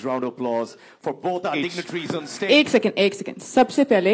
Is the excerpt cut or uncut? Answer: cut